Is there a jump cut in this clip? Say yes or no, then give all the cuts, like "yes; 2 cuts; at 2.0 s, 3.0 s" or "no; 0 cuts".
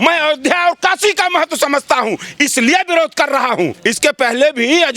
yes; 1 cut; at 3.8 s